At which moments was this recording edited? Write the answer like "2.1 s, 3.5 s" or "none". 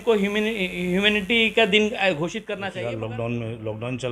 2.5 s